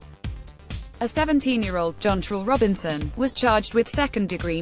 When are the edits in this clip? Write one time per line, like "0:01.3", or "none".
0:01.0